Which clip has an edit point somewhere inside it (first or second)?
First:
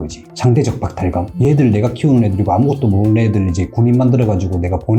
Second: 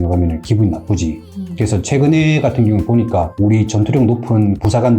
second